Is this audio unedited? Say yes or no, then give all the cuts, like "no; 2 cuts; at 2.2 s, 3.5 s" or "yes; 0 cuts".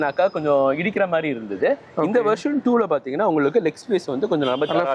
yes; 0 cuts